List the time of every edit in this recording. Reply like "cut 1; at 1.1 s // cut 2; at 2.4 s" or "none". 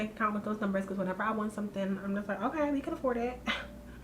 none